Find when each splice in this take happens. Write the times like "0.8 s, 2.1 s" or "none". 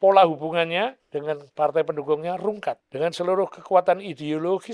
1.1 s, 2.8 s